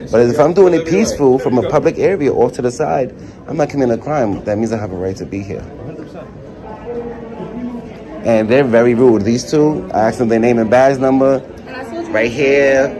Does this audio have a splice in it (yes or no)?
no